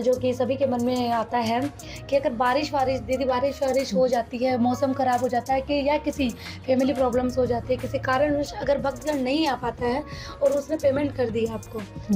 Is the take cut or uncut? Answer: uncut